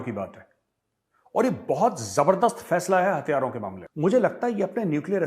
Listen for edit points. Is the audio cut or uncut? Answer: cut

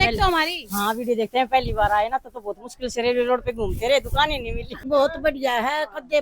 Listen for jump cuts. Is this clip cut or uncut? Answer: cut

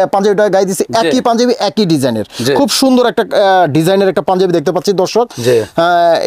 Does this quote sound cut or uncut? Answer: uncut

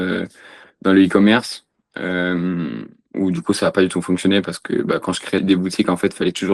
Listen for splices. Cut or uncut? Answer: uncut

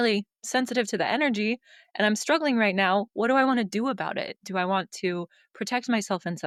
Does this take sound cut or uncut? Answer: uncut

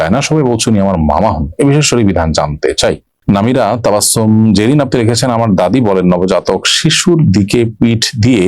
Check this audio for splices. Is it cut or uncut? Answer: cut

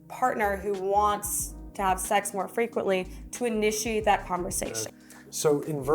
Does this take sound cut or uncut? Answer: cut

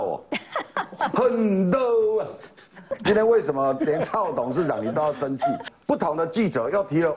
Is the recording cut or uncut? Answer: cut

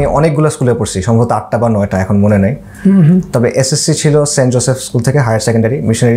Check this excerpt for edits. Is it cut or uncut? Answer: uncut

